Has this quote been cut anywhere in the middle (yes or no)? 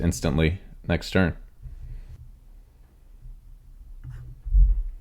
yes